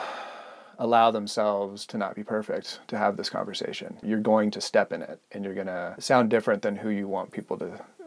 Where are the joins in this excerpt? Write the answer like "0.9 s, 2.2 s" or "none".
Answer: 4.0 s, 5.9 s